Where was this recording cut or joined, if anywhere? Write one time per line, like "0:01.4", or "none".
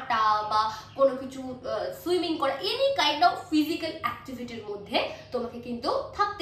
none